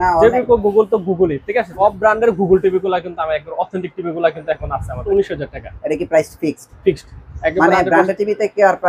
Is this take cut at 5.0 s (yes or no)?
yes